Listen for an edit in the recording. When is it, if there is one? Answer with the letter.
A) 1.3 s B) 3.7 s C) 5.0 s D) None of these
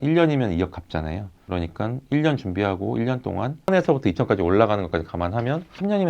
B